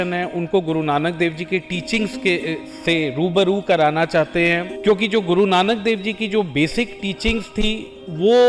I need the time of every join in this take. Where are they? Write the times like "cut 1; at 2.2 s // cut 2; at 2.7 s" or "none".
cut 1; at 4.7 s

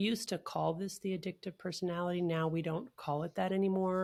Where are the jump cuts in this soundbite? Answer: none

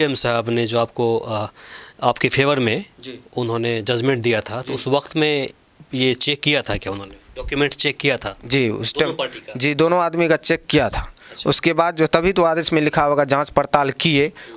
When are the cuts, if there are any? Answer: none

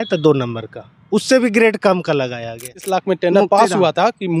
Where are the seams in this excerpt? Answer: cut 1; at 2.8 s

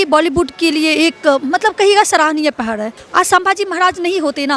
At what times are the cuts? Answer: cut 1; at 3.0 s

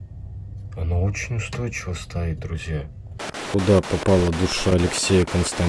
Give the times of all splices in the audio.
cut 1; at 3.2 s

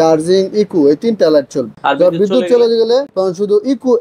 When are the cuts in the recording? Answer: cut 1; at 1.7 s // cut 2; at 3.1 s

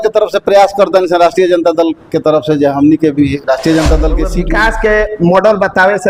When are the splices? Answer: cut 1; at 4.4 s

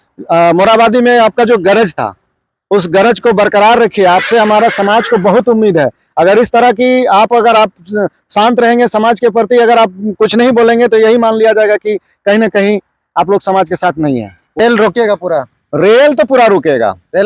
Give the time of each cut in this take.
cut 1; at 14.5 s

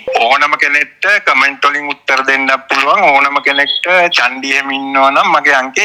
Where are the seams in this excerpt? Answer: none

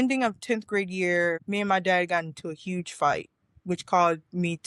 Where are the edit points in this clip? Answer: cut 1; at 1.4 s

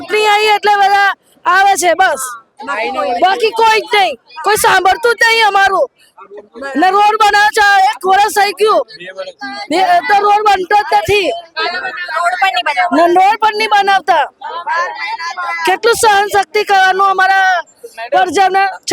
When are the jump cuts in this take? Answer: none

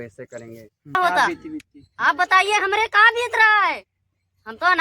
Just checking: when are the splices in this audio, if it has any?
cut 1; at 1.0 s

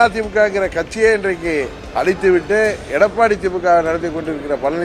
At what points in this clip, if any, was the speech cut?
cut 1; at 1.8 s

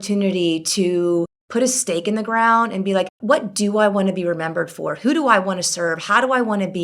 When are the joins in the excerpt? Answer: cut 1; at 1.4 s // cut 2; at 3.1 s

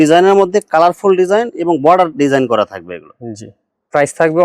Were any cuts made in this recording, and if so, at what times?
none

